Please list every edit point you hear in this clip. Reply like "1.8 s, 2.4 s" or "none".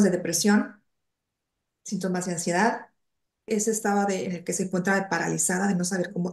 3.5 s